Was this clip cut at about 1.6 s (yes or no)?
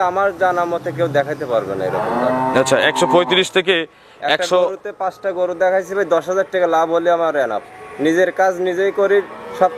no